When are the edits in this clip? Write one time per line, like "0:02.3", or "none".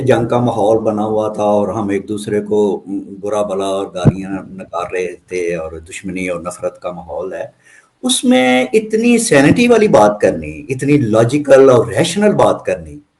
none